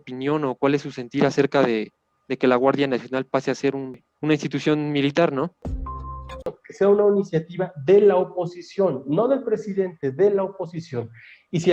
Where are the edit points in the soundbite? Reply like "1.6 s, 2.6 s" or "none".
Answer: 4.0 s, 6.0 s